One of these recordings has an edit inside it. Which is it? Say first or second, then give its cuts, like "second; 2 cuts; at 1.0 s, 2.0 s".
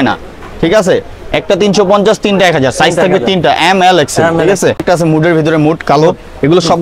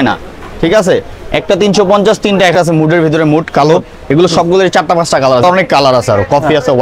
second; 2 cuts; at 2.5 s, 5.4 s